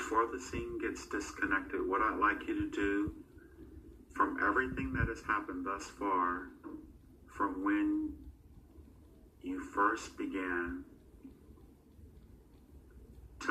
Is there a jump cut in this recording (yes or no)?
yes